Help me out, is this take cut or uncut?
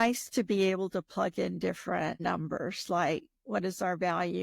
cut